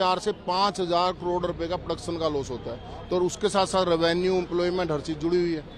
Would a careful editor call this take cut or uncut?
uncut